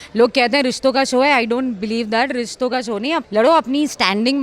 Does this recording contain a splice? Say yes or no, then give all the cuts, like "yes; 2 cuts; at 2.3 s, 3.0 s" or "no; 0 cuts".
yes; 1 cut; at 3.3 s